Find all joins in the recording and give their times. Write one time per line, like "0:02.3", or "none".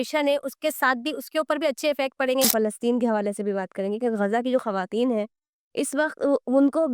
0:02.5